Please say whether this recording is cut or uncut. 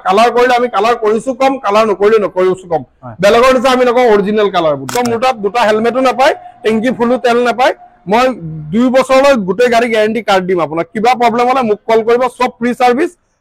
cut